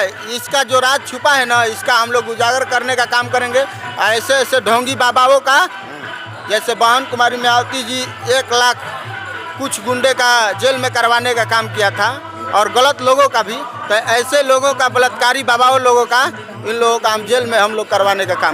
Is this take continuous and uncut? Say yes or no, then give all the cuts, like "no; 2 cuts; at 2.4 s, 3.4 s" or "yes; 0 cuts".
yes; 0 cuts